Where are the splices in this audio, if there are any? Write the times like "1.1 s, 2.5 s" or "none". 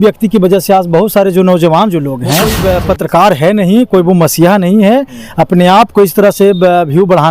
2.5 s

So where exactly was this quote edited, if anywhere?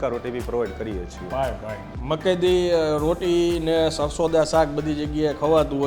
1.9 s

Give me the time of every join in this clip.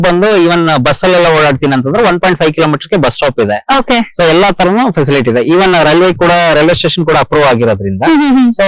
none

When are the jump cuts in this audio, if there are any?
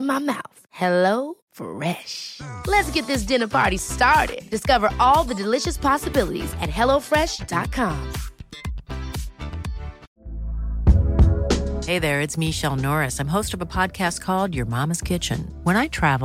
10.2 s

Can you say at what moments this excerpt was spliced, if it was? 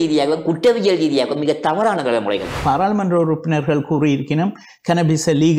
2.6 s

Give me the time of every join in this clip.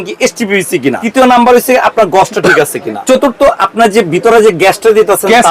1.0 s, 3.0 s

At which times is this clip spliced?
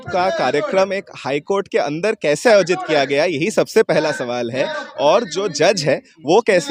none

